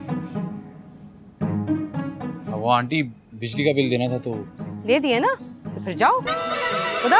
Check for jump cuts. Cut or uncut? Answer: uncut